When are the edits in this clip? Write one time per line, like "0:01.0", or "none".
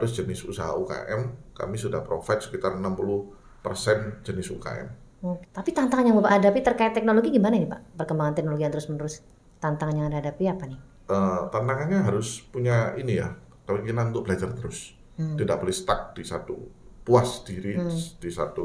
0:05.5